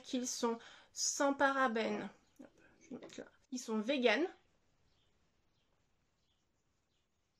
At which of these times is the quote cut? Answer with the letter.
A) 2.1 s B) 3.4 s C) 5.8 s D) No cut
B